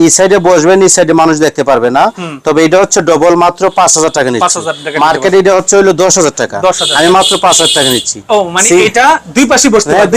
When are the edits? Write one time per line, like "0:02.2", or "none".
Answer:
none